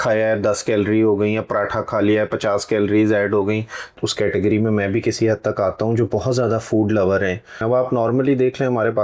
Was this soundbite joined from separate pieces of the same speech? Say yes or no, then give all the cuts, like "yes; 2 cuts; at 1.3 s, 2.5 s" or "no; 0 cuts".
yes; 2 cuts; at 3.9 s, 7.6 s